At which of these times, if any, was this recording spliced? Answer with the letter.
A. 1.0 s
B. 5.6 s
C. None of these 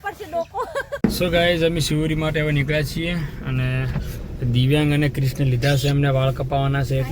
A